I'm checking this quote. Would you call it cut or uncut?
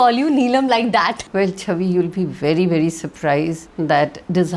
cut